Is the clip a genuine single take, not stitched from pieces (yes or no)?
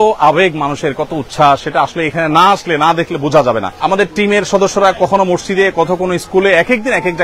no